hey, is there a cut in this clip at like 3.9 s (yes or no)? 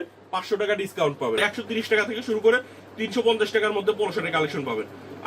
no